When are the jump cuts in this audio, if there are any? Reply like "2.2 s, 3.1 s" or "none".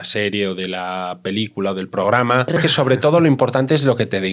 2.6 s